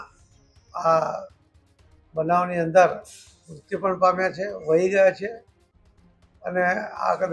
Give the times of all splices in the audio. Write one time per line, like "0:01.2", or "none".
none